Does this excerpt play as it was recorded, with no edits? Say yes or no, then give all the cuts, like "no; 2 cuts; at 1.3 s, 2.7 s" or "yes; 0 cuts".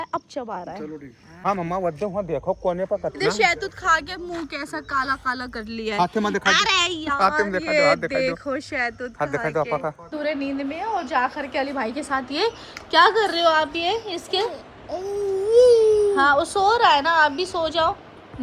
no; 2 cuts; at 1.3 s, 10.0 s